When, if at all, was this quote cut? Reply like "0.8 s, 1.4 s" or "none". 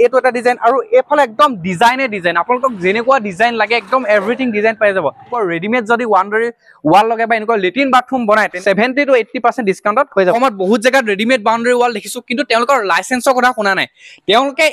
5.3 s, 8.5 s, 10.3 s